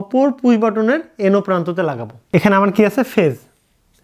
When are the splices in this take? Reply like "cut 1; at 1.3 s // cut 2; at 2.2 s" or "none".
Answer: cut 1; at 2.1 s